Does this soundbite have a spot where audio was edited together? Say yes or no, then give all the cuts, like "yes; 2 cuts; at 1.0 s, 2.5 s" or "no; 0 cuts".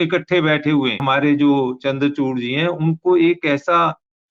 yes; 1 cut; at 1.0 s